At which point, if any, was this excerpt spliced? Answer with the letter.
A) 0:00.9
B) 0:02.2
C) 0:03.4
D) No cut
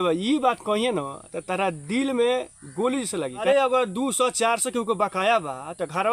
C